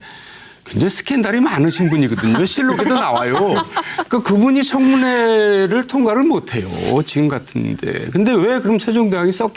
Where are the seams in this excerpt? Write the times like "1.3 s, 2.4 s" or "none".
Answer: 6.7 s